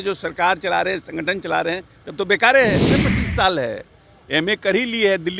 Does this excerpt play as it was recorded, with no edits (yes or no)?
no